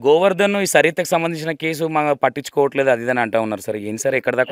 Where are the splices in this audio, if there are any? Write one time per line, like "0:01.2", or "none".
none

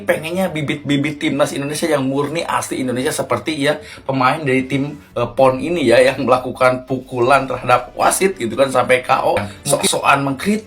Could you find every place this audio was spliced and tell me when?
0:09.5

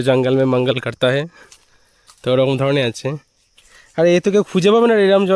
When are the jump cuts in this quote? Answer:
none

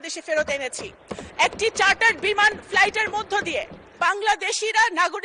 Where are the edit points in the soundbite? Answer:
0:03.8

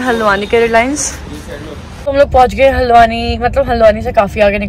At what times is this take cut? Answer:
0:02.1

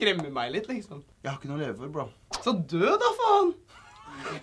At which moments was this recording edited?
0:01.0
0:02.2

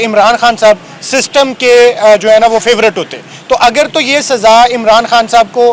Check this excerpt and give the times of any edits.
none

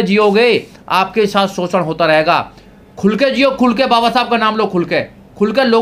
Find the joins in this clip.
none

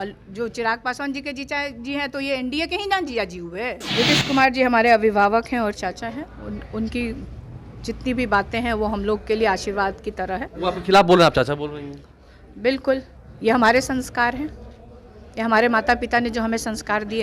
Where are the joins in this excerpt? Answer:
0:03.8

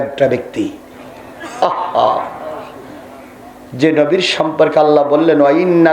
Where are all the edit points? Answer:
none

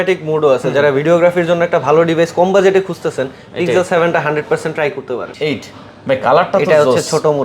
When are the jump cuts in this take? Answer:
0:05.3

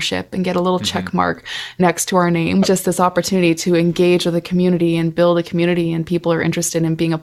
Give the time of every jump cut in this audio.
0:02.6

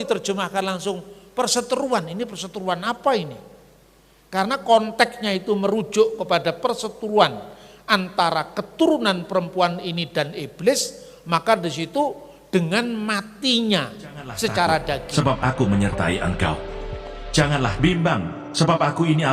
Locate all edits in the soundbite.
0:15.1

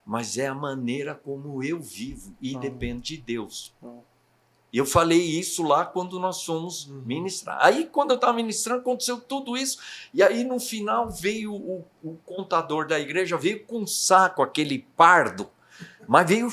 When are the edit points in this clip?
none

